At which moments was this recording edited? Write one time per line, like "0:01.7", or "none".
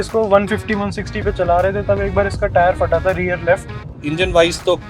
0:03.9